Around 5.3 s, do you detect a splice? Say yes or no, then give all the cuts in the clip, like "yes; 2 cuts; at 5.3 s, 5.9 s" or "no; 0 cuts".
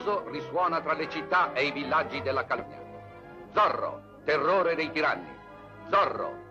no; 1 cut; at 2.6 s